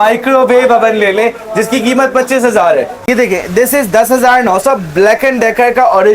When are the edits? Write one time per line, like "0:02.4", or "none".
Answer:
0:03.0